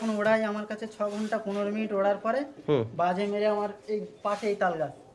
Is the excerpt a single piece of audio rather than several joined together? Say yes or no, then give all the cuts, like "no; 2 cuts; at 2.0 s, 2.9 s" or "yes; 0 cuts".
yes; 0 cuts